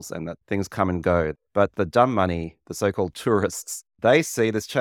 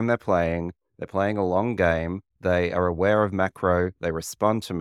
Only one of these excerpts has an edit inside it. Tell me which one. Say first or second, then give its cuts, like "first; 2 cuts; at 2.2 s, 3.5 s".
first; 1 cut; at 1.3 s